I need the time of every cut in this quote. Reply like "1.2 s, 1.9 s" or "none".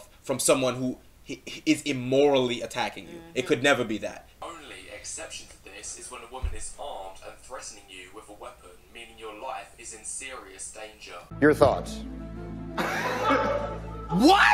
4.3 s